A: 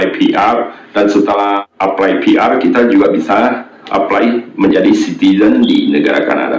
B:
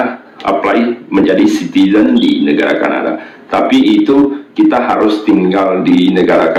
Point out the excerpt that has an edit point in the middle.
A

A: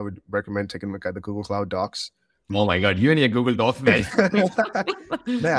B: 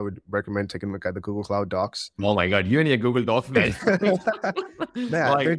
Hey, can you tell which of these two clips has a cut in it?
B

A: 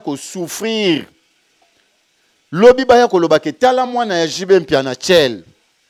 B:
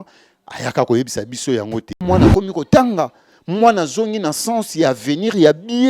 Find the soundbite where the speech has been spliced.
B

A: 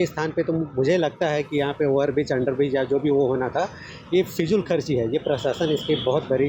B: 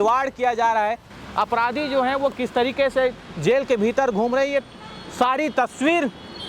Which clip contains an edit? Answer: B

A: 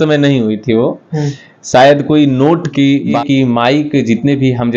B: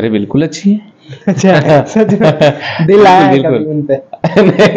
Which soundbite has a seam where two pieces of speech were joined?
A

